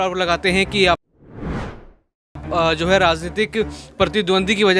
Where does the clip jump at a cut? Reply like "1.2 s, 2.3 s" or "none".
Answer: none